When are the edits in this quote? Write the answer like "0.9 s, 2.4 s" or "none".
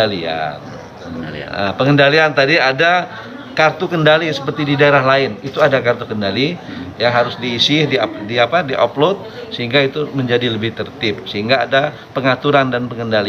none